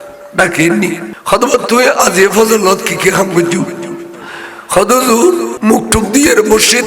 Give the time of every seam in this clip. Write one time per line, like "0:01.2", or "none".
0:01.1
0:05.5

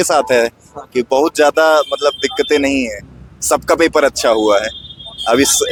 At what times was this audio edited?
none

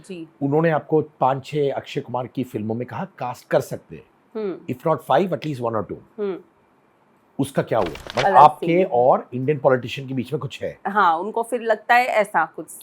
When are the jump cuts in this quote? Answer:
0:08.0

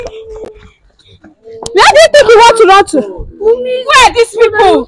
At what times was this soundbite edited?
none

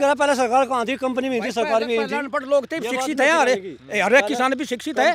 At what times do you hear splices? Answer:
none

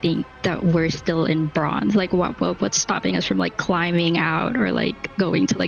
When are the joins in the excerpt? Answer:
none

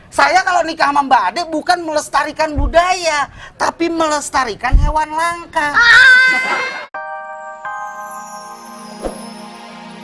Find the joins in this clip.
0:06.6

